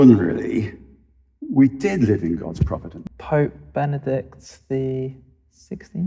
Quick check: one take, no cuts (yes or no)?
no